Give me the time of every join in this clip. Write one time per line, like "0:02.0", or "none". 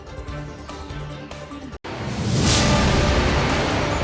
0:01.8